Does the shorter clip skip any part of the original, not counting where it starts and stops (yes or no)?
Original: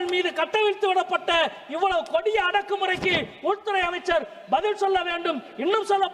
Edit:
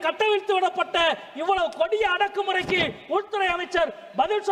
no